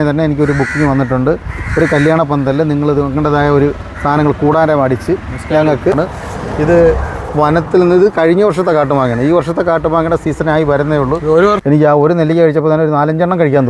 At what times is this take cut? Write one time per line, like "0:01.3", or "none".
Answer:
0:05.9
0:11.6